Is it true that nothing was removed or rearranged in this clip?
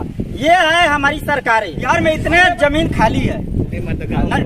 no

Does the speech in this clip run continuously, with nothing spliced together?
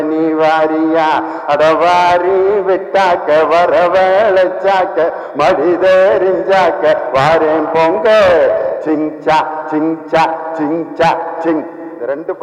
yes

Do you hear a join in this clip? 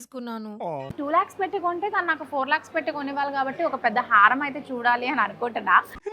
yes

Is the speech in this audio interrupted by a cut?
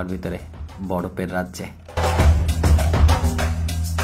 no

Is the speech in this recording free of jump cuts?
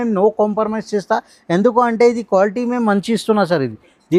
yes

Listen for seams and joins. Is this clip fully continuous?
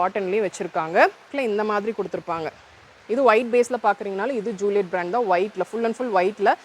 no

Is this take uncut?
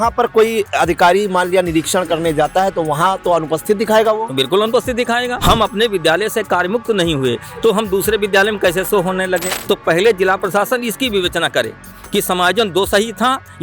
no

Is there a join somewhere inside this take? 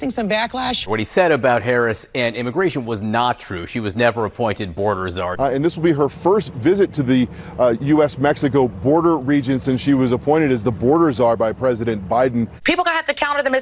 yes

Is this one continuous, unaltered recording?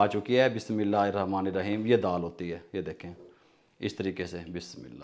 yes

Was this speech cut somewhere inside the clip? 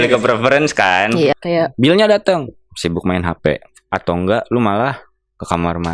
yes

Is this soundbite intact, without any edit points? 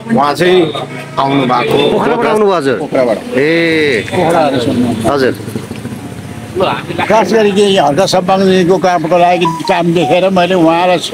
no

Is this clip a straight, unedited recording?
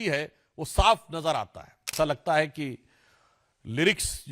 no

